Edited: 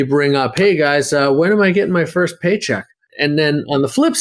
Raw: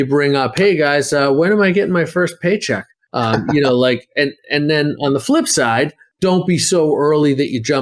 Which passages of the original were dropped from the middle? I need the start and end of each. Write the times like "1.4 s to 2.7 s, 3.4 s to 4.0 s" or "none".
3.1 s to 4.4 s